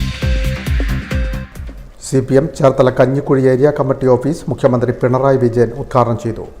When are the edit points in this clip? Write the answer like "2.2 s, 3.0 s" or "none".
1.5 s